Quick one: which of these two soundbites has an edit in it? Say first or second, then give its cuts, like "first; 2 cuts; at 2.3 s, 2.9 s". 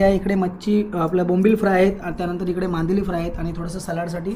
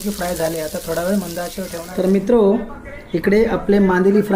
second; 1 cut; at 1.8 s